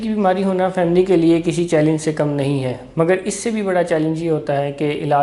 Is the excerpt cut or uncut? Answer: uncut